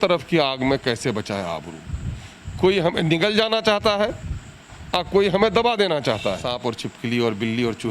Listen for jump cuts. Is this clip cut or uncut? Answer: cut